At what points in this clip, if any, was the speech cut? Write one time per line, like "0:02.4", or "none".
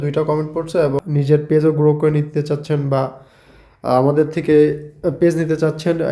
0:01.0

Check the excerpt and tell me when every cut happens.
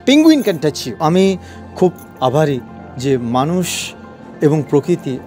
0:01.0

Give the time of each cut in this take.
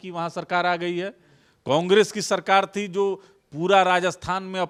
none

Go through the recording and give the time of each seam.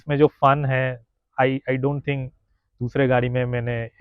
none

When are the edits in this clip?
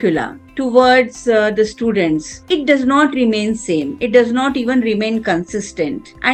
none

